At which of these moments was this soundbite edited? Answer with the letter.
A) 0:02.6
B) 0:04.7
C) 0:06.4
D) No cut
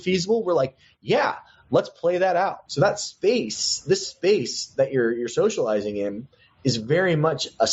A